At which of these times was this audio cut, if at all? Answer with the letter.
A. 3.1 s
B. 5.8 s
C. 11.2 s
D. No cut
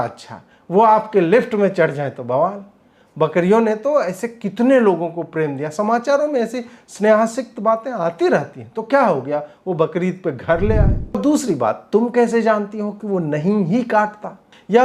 C